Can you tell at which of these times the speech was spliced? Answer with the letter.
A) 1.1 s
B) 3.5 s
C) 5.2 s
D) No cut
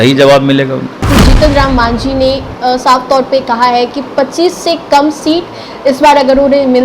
A